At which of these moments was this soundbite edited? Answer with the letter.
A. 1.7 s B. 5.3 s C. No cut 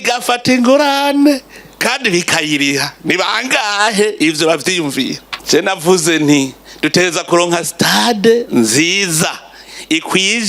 B